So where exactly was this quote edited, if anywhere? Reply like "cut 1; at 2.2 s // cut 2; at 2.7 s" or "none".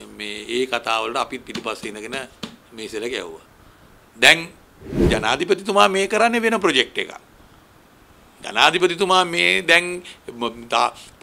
cut 1; at 5.1 s

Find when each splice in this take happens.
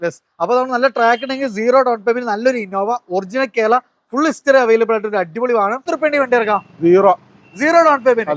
cut 1; at 5.9 s

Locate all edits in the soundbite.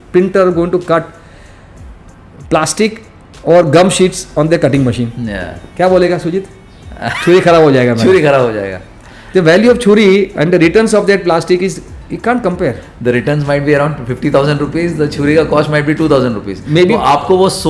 none

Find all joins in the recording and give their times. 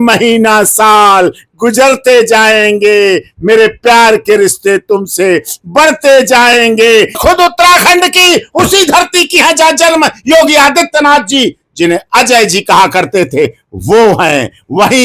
cut 1; at 7.2 s

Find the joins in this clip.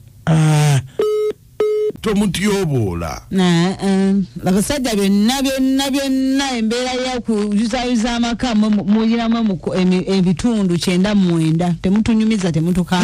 cut 1; at 2.0 s

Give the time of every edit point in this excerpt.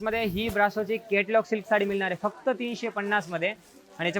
none

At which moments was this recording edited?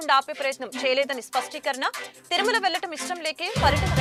none

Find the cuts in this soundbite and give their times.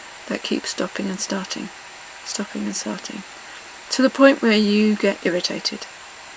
none

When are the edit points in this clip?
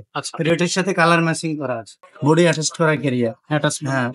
cut 1; at 2.0 s

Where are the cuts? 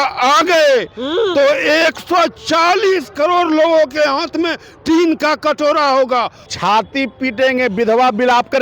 cut 1; at 6.5 s

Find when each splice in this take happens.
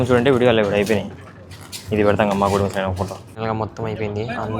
cut 1; at 3.3 s

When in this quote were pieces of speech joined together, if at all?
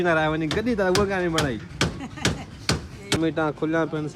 cut 1; at 3.2 s

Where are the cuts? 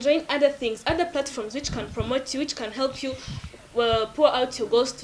none

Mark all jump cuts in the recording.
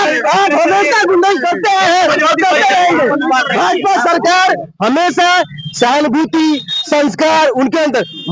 none

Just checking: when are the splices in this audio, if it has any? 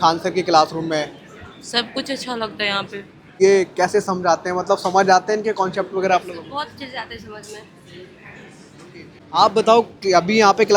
cut 1; at 3.3 s // cut 2; at 9.2 s

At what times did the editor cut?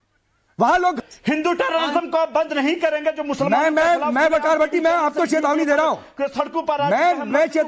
cut 1; at 1.0 s

